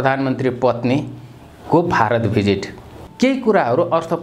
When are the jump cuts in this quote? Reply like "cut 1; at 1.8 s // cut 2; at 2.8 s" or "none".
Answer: cut 1; at 3.0 s

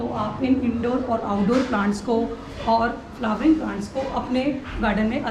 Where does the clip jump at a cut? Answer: none

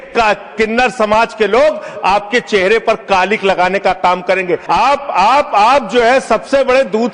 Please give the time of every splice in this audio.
cut 1; at 4.6 s

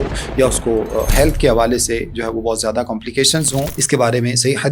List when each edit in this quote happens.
cut 1; at 3.8 s

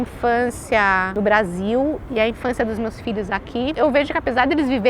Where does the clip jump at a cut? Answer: cut 1; at 1.1 s // cut 2; at 3.7 s

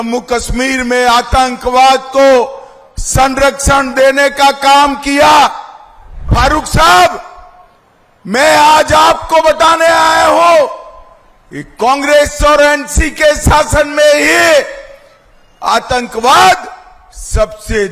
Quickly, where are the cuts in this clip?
cut 1; at 6.3 s

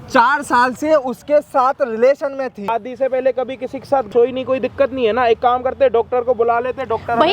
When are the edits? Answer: cut 1; at 2.7 s // cut 2; at 4.1 s

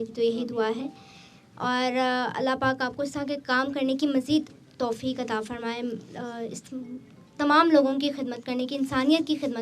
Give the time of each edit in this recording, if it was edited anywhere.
none

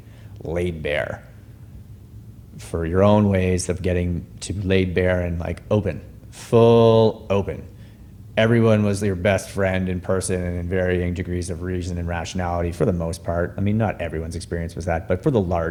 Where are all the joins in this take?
none

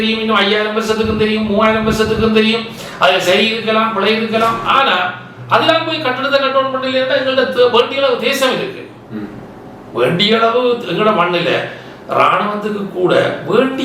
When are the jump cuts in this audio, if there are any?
none

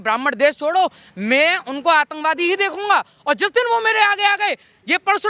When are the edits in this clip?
none

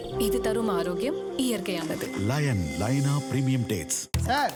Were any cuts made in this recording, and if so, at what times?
none

